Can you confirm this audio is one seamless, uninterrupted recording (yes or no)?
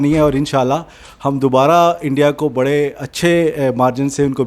yes